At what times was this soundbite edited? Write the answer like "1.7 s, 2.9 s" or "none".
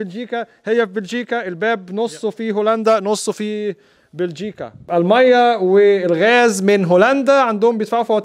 4.9 s